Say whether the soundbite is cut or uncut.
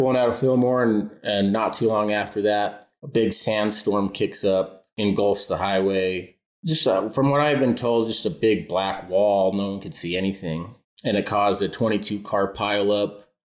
uncut